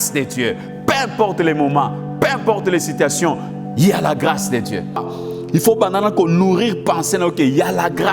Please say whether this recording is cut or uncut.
cut